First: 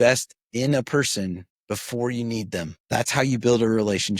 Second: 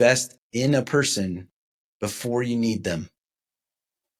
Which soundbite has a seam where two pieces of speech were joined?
first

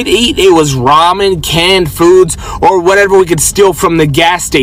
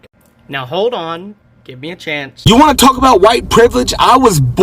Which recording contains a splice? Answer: second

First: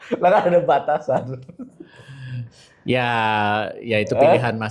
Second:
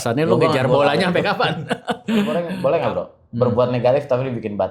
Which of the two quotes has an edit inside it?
second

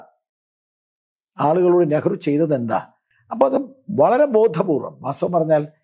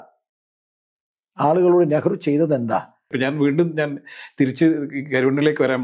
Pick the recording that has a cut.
first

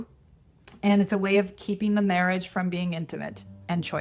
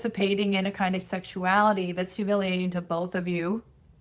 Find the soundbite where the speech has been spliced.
second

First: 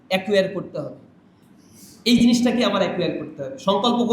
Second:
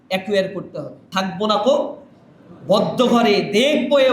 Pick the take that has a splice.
second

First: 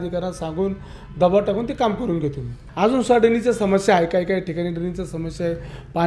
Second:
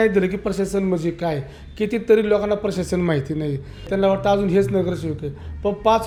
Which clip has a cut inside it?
first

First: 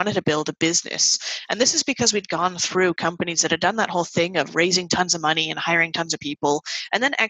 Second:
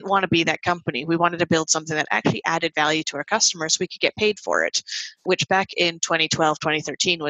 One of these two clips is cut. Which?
second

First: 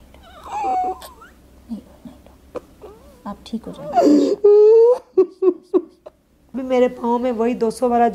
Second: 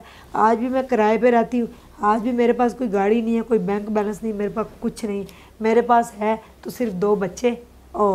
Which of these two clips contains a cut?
first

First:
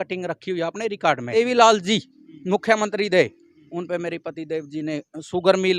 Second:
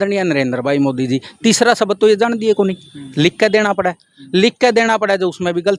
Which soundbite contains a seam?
first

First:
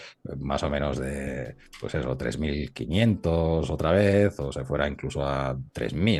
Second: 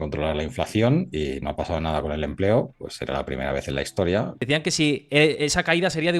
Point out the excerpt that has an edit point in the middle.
second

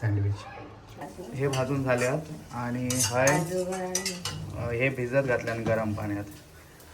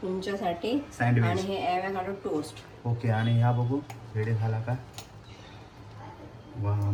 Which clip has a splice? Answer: first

